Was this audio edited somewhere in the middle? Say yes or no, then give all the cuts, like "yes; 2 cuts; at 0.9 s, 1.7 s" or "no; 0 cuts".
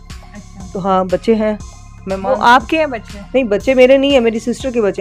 no; 0 cuts